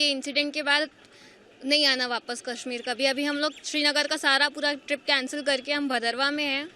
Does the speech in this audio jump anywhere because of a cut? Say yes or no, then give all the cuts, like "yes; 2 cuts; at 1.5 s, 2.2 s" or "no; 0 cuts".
no; 0 cuts